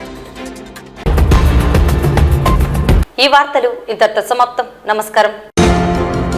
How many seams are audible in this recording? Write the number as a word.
zero